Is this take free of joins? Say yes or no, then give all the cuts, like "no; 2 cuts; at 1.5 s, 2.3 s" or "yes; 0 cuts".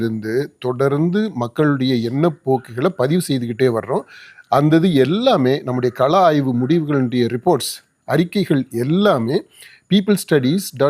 yes; 0 cuts